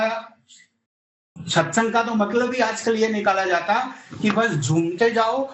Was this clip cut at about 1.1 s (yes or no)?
yes